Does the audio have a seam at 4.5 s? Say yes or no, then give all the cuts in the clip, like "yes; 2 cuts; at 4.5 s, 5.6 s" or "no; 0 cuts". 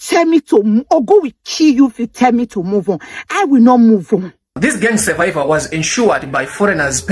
yes; 1 cut; at 4.5 s